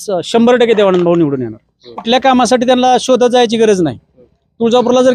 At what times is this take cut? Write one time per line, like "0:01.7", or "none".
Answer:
0:02.0